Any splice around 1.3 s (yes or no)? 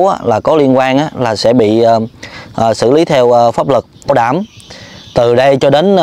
no